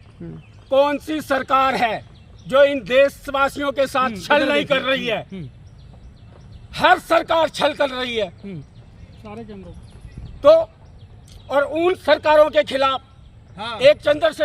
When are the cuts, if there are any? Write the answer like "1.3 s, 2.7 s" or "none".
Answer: none